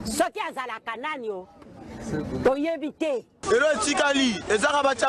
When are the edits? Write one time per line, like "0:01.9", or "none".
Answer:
none